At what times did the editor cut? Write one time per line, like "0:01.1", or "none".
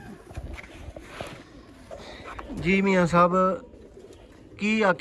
none